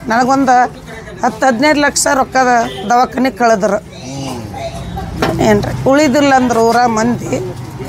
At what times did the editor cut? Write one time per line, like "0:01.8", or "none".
none